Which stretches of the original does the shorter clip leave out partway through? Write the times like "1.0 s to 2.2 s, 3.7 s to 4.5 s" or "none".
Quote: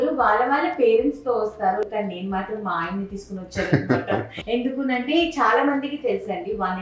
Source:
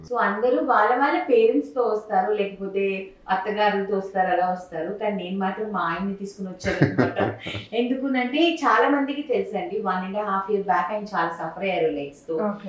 2.3 s to 4.9 s, 7.4 s to 7.6 s